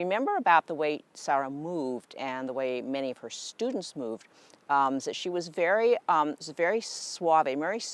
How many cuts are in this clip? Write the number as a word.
one